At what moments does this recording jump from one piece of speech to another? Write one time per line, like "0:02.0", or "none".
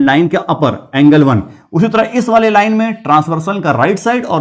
none

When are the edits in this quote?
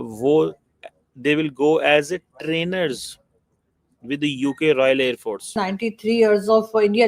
0:05.4

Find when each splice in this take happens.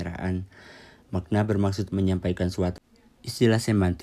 0:02.7

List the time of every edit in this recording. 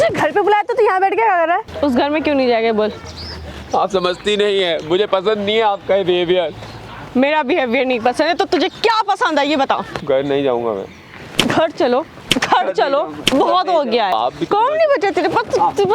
0:01.7
0:09.9
0:14.1

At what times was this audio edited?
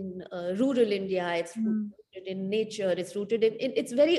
none

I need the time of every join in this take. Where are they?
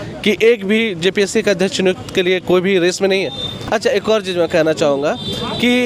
none

